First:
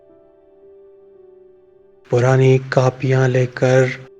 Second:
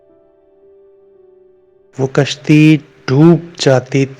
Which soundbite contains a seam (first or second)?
second